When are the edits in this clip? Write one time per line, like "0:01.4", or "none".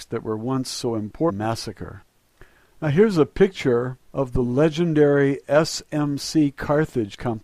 none